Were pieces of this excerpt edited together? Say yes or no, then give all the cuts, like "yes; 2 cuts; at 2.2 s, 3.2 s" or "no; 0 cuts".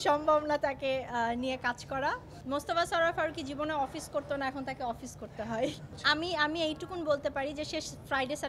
yes; 2 cuts; at 2.3 s, 5.9 s